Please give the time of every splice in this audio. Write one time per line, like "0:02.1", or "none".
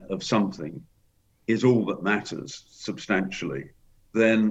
none